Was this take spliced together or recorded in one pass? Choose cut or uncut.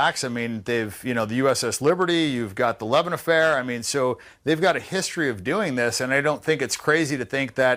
uncut